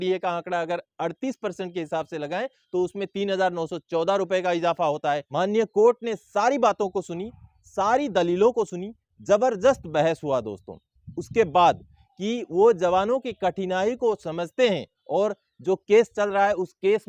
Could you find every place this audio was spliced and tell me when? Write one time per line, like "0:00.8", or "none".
0:05.3
0:12.0